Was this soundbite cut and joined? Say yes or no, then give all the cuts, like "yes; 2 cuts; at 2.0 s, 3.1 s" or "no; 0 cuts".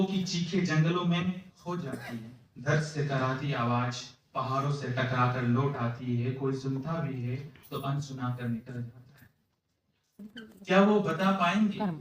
yes; 1 cut; at 10.4 s